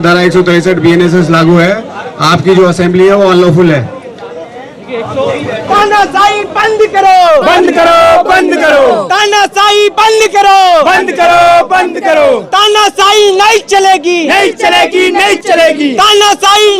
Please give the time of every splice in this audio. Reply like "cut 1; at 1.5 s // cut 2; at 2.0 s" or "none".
none